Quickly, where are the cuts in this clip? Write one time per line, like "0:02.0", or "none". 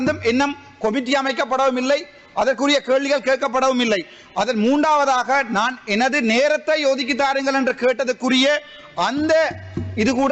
none